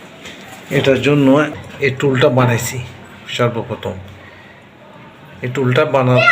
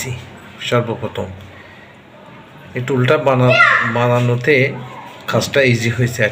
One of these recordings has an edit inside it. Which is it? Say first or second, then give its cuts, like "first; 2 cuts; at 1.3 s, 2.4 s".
first; 1 cut; at 1.5 s